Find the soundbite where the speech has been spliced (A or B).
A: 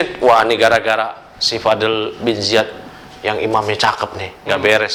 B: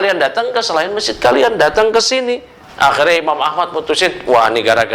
B